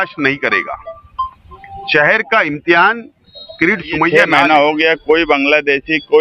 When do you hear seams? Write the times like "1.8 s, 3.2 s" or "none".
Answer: 4.1 s